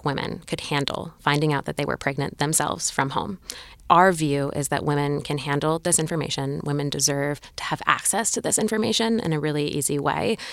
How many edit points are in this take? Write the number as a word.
zero